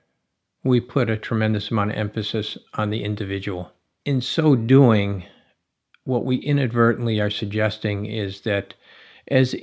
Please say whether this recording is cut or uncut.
cut